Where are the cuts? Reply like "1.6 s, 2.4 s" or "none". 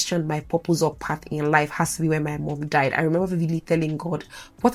none